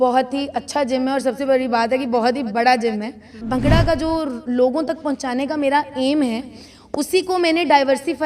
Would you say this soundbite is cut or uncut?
cut